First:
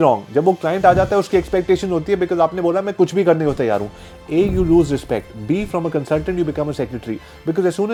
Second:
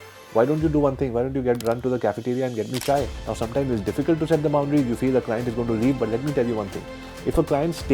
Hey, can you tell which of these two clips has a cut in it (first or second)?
second